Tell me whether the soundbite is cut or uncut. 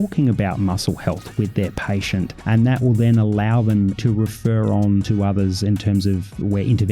cut